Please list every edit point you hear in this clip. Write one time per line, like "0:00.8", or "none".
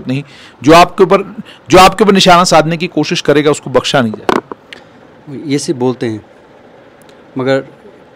none